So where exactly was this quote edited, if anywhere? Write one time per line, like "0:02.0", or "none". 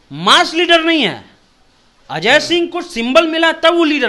none